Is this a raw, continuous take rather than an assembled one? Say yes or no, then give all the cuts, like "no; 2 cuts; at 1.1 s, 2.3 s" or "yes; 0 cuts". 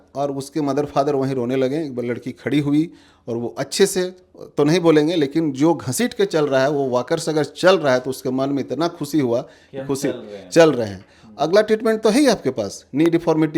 yes; 0 cuts